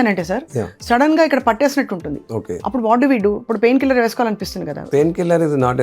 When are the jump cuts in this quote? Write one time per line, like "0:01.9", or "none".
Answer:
0:02.5
0:04.9